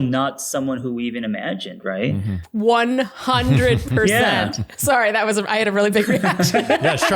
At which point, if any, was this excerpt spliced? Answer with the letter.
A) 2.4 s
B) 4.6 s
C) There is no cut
A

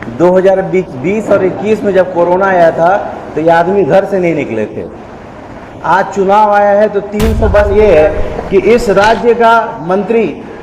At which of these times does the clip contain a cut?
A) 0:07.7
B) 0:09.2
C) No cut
A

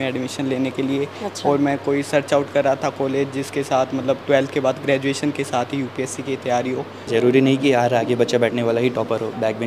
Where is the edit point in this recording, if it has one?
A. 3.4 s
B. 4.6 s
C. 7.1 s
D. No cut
C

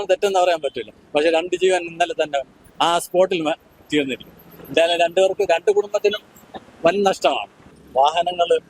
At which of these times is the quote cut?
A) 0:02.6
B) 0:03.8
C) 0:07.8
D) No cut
C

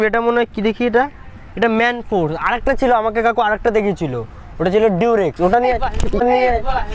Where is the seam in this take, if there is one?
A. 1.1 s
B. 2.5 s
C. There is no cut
C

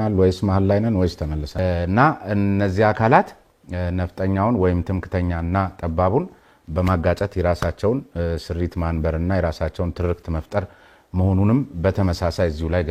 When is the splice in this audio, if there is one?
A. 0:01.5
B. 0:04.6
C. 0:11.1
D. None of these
A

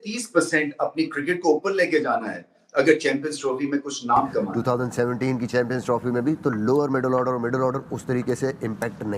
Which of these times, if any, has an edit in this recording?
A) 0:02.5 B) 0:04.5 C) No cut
B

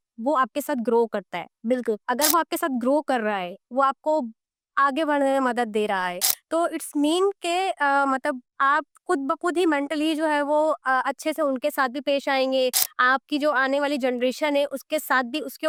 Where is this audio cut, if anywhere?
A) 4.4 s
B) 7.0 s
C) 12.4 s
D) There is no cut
D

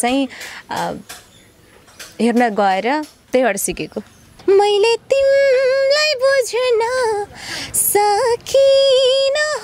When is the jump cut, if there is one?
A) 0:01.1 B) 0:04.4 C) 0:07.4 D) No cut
B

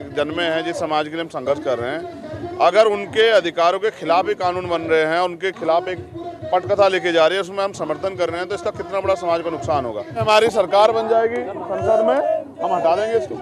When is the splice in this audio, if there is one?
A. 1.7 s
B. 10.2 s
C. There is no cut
B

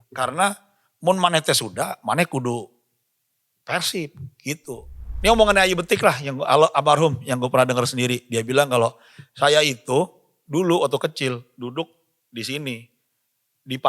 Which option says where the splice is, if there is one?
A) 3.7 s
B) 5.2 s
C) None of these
B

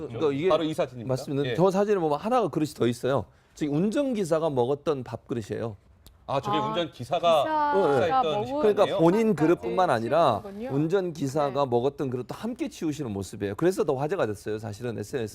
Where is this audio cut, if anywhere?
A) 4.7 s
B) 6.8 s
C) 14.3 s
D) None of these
B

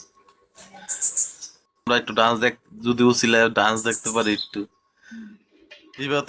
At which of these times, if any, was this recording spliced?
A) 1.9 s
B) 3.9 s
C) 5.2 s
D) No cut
A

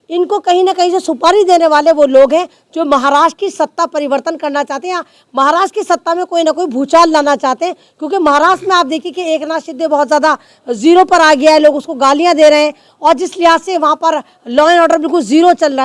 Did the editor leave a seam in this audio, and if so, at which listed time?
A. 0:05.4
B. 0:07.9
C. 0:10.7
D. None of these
D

